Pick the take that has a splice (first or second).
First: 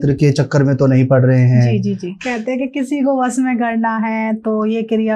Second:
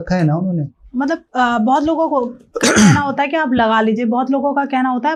first